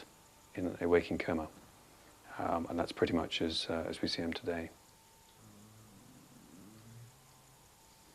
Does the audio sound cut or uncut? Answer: cut